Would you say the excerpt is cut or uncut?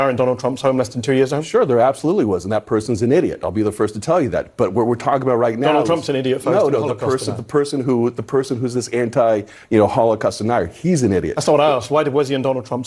uncut